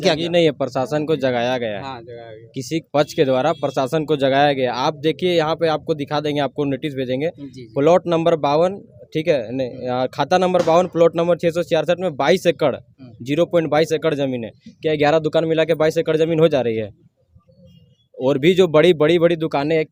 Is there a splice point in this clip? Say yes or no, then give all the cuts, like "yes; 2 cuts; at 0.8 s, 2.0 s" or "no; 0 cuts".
no; 0 cuts